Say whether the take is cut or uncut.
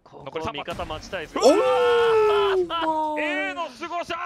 uncut